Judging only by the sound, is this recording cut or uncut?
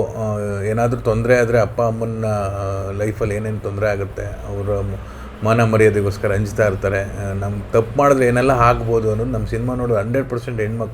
uncut